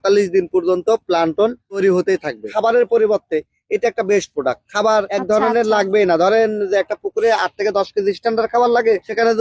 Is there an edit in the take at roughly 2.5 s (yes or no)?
yes